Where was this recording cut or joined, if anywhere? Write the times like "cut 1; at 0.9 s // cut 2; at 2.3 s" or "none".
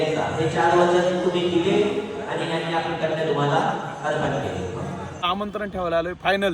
cut 1; at 5.3 s